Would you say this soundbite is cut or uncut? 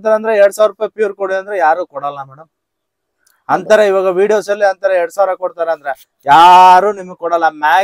uncut